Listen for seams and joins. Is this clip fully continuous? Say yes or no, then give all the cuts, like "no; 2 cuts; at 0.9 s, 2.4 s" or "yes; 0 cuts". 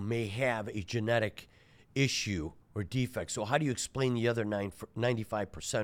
yes; 0 cuts